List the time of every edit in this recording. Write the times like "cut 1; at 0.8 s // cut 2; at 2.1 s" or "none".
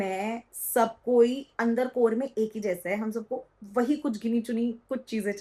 none